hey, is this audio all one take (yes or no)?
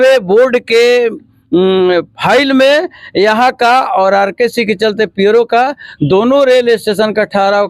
yes